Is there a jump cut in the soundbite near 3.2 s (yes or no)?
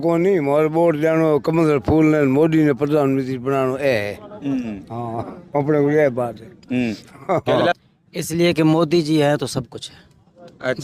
no